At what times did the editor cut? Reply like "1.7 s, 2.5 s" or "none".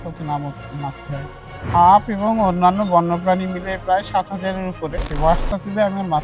1.6 s, 5.0 s